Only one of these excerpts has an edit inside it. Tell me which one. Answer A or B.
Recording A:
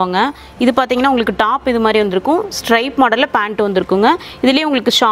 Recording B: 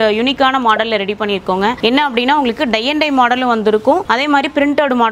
B